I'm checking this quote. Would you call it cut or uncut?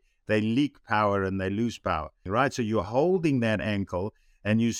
cut